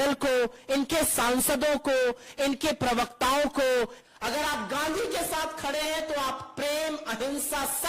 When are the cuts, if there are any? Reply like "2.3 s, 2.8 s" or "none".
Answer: 4.0 s